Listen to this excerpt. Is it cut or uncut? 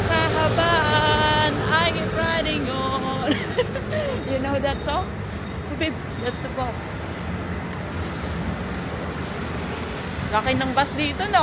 uncut